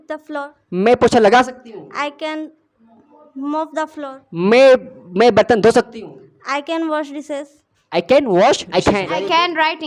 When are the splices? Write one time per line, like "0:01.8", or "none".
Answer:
0:08.6